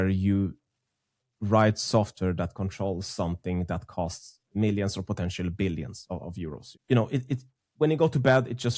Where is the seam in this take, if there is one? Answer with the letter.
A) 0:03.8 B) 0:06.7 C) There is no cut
B